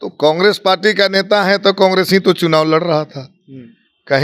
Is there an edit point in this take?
no; 0 cuts

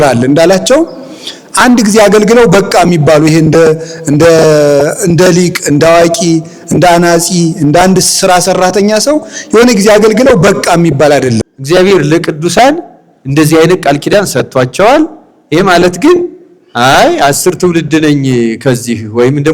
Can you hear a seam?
yes; 1 cut; at 11.5 s

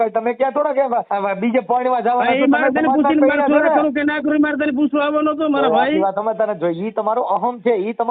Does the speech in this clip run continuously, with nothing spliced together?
no; 1 cut; at 1.1 s

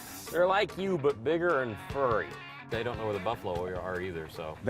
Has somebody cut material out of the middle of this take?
yes; 1 cut; at 2.7 s

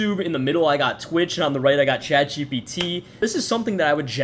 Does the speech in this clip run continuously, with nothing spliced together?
no; 1 cut; at 3.1 s

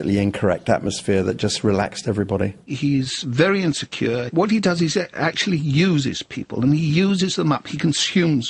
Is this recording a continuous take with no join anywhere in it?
no; 2 cuts; at 2.7 s, 4.3 s

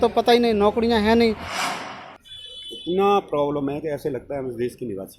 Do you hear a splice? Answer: yes; 1 cut; at 1.7 s

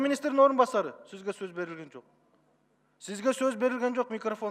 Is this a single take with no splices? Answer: yes; 0 cuts

